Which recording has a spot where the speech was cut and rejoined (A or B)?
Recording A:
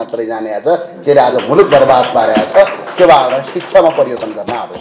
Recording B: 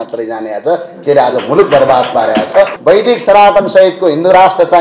B